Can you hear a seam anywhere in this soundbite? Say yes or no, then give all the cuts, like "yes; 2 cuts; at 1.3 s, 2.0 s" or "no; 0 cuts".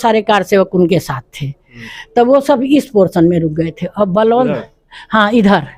no; 0 cuts